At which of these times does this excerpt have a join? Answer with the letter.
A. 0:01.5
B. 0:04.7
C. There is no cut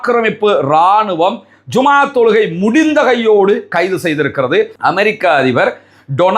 B